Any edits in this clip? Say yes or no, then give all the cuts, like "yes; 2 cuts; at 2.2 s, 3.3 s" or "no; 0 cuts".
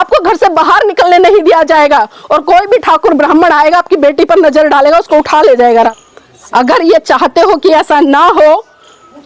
no; 0 cuts